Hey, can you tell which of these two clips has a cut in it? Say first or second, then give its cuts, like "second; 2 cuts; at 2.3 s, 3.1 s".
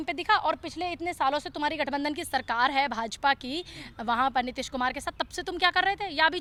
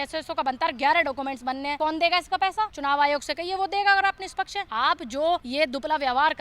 second; 4 cuts; at 1.7 s, 2.7 s, 4.6 s, 5.5 s